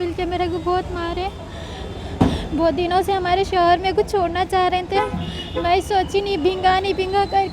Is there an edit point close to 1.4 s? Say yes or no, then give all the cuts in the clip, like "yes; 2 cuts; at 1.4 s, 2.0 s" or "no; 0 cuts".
no; 0 cuts